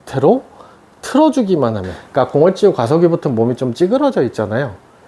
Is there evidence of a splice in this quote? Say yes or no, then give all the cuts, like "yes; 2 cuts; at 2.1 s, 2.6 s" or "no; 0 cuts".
yes; 1 cut; at 1.9 s